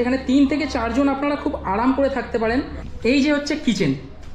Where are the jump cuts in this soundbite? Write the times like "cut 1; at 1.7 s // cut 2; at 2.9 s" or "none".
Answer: cut 1; at 2.8 s